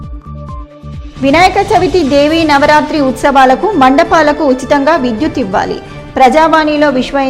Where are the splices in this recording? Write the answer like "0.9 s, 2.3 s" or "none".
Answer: 1.0 s